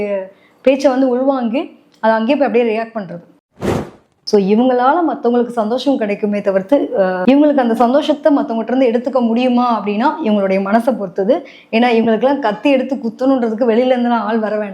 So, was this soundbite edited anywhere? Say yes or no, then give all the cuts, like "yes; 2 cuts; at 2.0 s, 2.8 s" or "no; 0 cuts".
yes; 1 cut; at 3.6 s